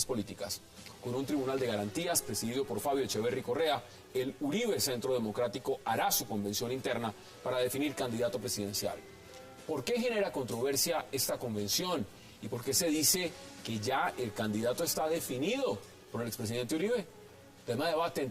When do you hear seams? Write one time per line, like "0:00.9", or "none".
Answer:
0:05.7